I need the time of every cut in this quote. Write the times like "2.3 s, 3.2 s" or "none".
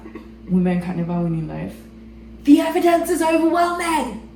none

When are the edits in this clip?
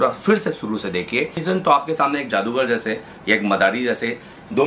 1.4 s

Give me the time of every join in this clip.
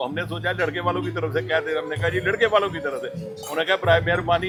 none

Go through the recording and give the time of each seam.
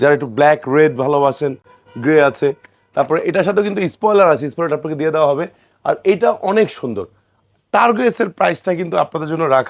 none

